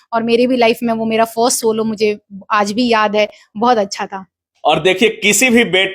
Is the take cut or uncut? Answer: uncut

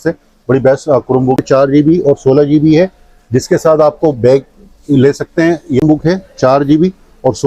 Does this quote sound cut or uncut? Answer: cut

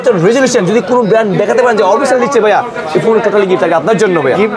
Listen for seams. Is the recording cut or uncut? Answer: uncut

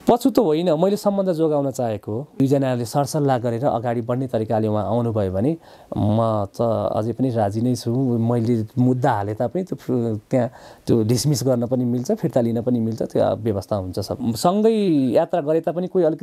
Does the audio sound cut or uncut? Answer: cut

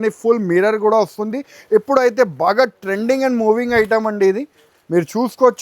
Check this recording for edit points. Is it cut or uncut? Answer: cut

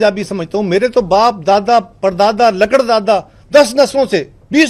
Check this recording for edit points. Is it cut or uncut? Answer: uncut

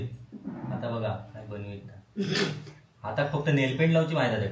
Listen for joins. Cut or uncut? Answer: uncut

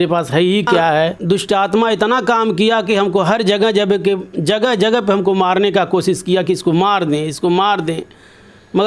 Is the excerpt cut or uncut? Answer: cut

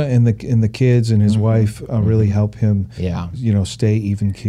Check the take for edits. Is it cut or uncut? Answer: uncut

